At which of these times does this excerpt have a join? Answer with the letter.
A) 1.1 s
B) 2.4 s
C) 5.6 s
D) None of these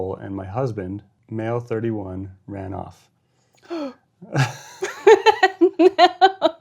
A